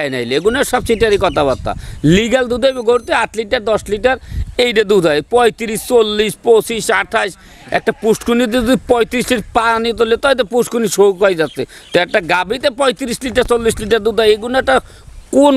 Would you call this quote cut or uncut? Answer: uncut